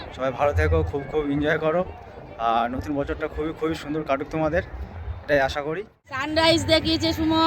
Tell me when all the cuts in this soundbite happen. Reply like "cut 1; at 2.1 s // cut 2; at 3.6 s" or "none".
cut 1; at 6.3 s